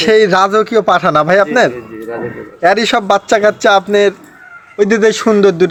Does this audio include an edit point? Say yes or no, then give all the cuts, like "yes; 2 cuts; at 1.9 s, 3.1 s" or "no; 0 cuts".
no; 0 cuts